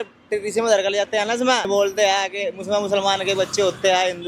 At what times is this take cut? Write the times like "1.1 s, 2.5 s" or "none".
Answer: 1.7 s